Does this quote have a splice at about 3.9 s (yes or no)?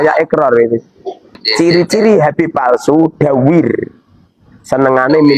no